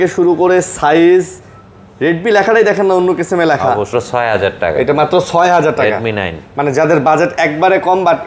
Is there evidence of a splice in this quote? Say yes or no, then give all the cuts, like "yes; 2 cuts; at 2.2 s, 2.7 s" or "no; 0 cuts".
yes; 1 cut; at 3.9 s